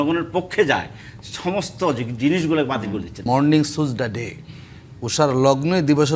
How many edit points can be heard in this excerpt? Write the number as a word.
one